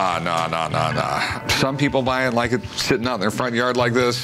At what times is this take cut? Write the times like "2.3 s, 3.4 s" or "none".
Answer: none